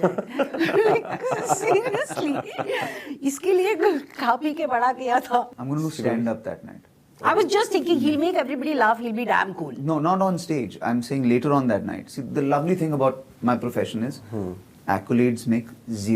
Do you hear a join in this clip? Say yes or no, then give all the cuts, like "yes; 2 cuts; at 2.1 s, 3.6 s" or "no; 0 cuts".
yes; 1 cut; at 5.5 s